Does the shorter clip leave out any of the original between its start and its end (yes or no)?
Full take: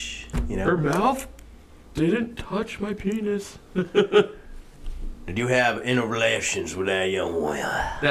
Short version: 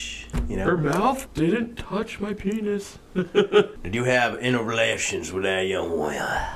yes